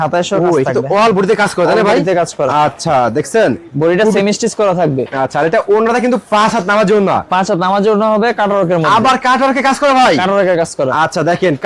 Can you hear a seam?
no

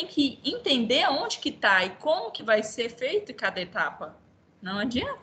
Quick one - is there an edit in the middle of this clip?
no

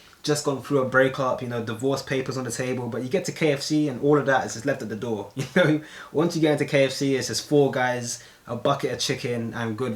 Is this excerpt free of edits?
yes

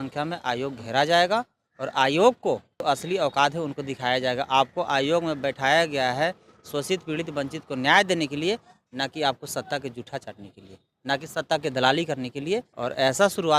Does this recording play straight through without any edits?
no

